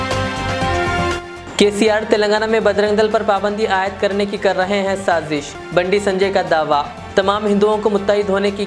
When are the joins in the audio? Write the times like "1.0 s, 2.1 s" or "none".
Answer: 1.2 s